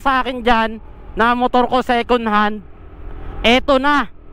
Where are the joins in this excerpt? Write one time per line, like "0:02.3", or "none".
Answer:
none